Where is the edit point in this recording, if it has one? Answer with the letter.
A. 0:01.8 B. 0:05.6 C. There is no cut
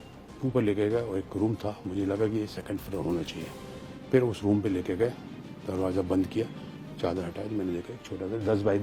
C